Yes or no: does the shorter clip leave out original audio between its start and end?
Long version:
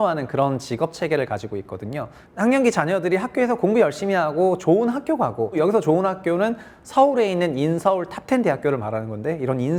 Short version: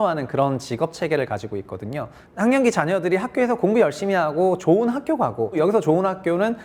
no